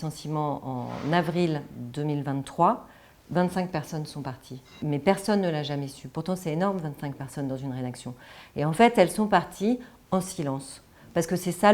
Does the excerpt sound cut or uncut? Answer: cut